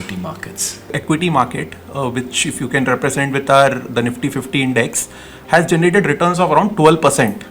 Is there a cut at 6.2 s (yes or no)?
no